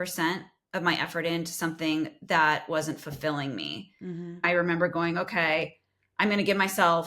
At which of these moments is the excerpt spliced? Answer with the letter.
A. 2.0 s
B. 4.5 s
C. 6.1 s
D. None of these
B